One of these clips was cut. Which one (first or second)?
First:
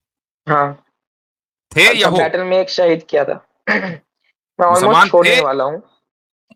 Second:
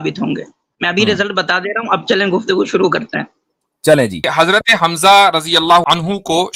second